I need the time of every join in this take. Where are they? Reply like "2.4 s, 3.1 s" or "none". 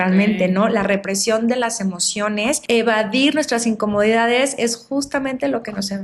2.6 s